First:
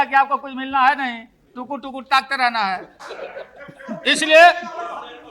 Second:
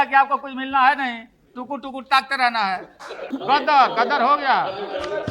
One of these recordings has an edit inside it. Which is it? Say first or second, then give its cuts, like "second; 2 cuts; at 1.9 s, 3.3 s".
second; 1 cut; at 3.3 s